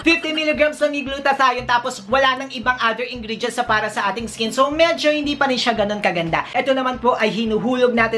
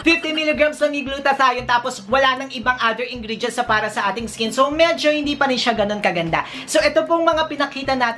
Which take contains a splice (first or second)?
first